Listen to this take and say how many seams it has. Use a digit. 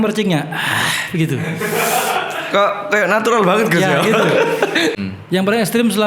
1